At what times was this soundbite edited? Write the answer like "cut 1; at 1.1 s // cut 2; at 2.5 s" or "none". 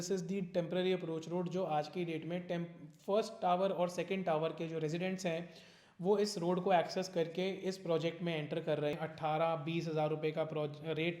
cut 1; at 8.9 s